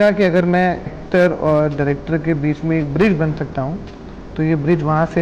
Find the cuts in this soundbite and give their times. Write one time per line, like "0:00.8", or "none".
0:01.0

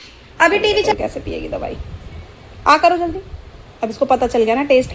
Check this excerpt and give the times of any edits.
0:00.9

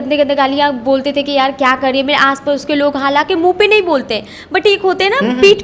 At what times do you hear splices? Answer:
none

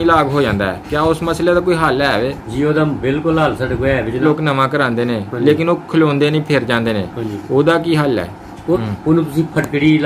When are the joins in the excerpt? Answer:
0:04.2
0:08.8

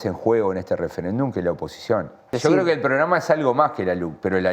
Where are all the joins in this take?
0:02.3

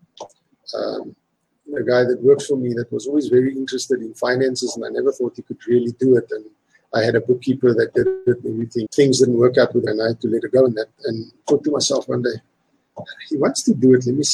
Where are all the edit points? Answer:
0:08.9
0:09.9

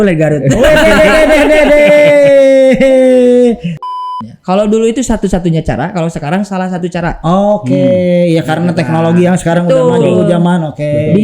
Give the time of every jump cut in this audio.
0:03.8

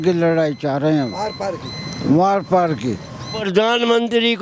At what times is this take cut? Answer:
0:03.4

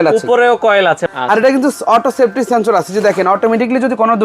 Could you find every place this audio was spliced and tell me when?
0:01.1

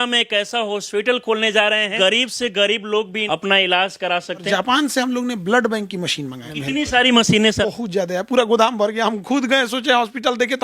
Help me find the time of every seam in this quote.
0:01.9
0:03.2
0:04.4
0:06.5
0:07.6

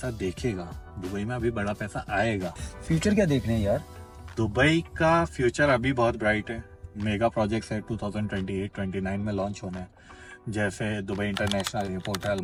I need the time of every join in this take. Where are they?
none

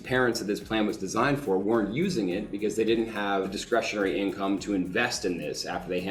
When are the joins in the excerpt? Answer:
0:03.6

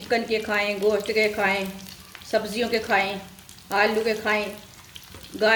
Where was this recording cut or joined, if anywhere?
none

